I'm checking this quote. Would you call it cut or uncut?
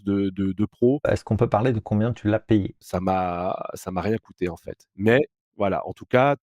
cut